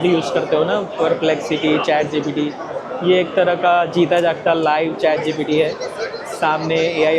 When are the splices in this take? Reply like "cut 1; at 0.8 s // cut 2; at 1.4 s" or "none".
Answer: none

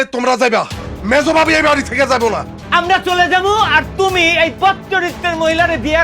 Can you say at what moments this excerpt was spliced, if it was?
cut 1; at 2.5 s

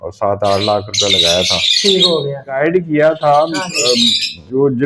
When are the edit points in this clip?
cut 1; at 2.6 s

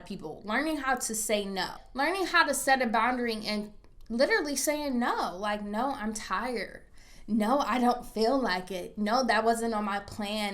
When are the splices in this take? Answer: cut 1; at 1.8 s

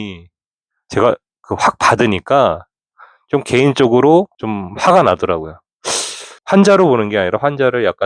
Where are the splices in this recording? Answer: cut 1; at 6.4 s

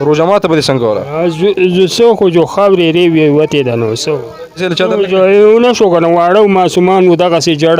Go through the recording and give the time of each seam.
cut 1; at 4.7 s

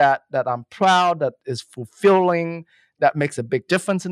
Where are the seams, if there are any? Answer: none

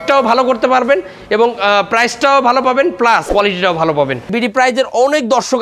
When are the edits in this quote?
cut 1; at 3.3 s // cut 2; at 4.3 s

